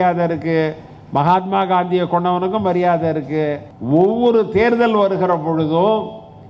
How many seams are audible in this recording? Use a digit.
1